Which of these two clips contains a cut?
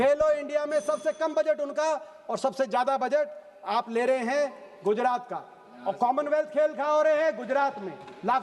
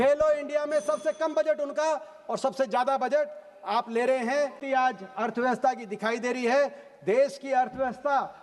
second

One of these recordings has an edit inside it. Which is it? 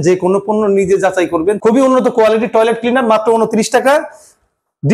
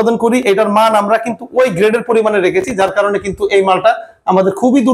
first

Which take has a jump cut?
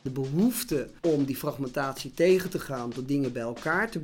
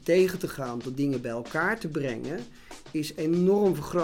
first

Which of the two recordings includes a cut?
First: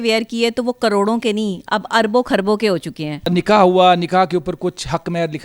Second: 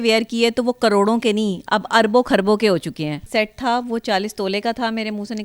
second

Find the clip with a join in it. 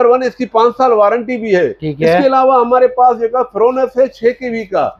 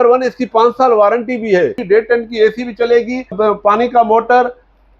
second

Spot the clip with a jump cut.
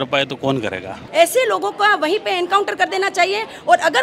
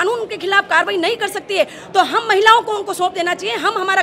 first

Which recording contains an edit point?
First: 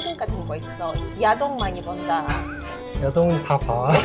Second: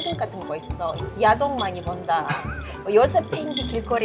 first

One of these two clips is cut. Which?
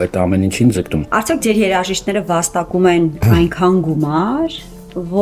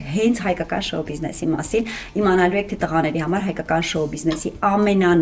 first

